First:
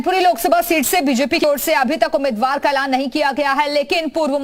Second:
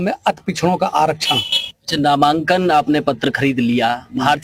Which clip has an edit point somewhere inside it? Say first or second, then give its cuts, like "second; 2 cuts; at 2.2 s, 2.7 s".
first; 1 cut; at 1.4 s